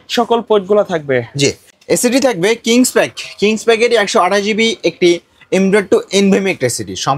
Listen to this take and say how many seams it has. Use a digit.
1